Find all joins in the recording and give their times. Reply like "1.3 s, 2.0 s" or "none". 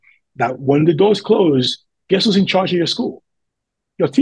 none